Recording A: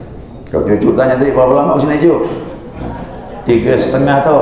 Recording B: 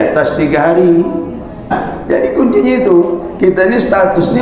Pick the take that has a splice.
B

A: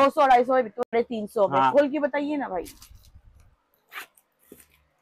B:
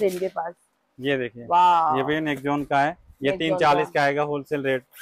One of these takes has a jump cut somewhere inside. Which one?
A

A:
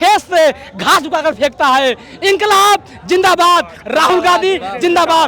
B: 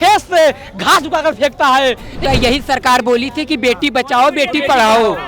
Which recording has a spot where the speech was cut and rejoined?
B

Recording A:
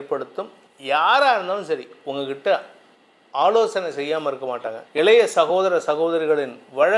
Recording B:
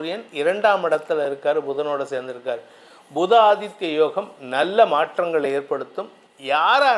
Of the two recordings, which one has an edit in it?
A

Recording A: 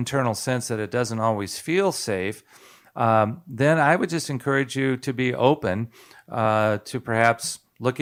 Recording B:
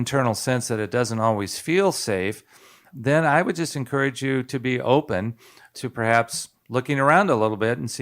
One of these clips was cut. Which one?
B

